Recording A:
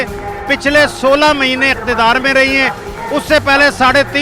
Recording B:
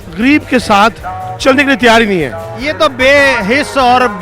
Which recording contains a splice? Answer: B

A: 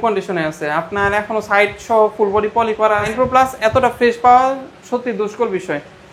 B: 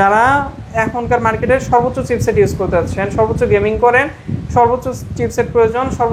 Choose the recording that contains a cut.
A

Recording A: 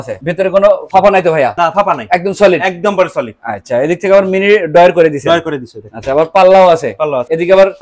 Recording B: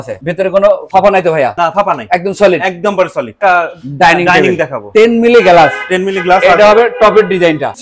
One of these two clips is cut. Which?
B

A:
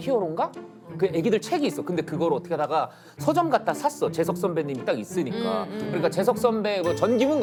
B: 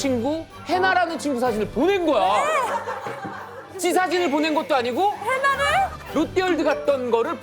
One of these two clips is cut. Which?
B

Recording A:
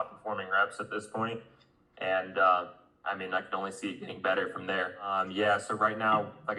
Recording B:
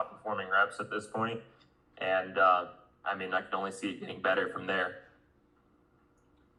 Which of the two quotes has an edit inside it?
A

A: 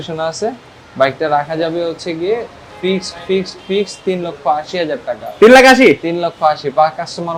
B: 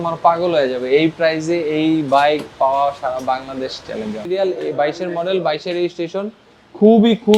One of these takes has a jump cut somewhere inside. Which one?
B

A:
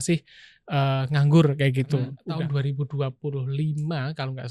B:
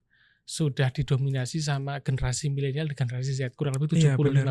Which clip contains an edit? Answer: A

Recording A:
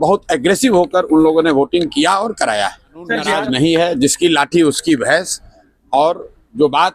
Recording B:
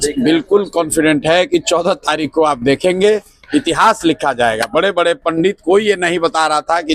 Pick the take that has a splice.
A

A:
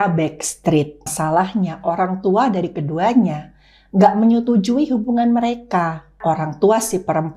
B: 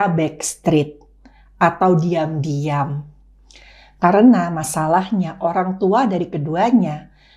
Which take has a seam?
A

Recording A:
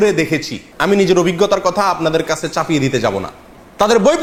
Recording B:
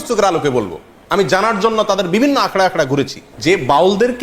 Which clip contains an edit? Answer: B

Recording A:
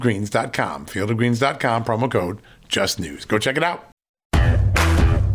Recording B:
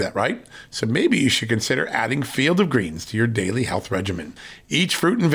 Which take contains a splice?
A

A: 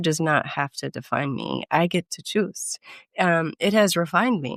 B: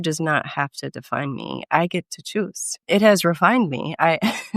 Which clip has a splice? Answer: B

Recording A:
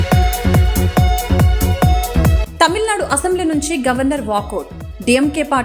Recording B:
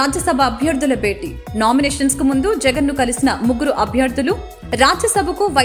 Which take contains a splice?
A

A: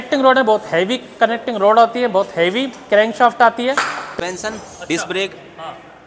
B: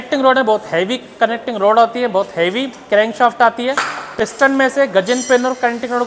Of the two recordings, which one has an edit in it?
A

